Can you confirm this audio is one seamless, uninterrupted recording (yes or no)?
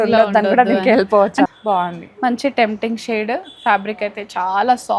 no